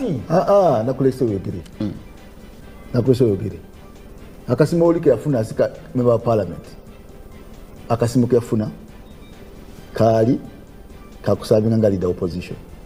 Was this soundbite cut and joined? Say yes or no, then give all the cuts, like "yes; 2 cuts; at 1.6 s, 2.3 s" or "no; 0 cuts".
no; 0 cuts